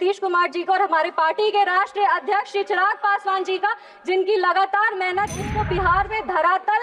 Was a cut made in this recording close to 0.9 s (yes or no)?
no